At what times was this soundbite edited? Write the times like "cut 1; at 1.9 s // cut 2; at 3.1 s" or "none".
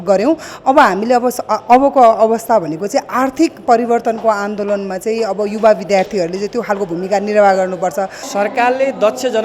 cut 1; at 8.2 s